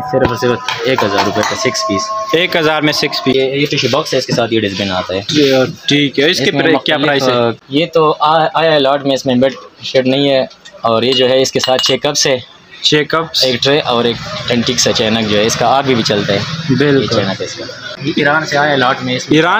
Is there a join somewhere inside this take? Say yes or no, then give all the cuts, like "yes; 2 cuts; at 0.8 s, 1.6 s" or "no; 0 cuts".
yes; 3 cuts; at 3.3 s, 7.6 s, 17.9 s